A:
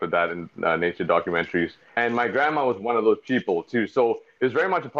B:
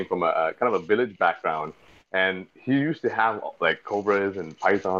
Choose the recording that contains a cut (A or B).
A